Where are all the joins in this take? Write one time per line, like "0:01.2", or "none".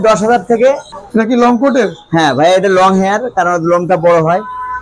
0:00.9